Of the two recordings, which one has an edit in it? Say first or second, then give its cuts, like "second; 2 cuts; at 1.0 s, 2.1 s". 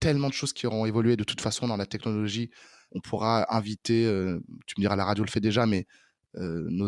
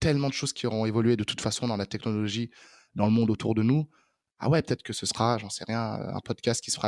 first; 1 cut; at 2.8 s